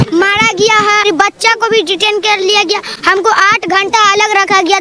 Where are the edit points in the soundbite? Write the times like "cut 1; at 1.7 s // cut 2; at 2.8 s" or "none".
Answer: cut 1; at 1.0 s // cut 2; at 2.9 s